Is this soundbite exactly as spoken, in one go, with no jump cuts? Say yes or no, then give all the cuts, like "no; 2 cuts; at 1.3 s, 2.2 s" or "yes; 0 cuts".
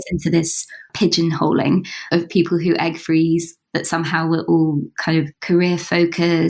no; 4 cuts; at 0.9 s, 2.0 s, 3.6 s, 5.4 s